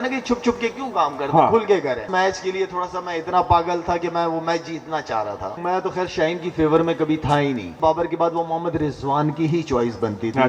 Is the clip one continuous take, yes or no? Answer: no